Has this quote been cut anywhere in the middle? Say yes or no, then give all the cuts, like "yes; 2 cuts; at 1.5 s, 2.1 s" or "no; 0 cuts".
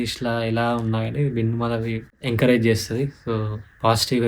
yes; 1 cut; at 2.1 s